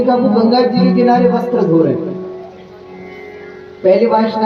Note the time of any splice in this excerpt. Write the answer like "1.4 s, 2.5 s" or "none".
none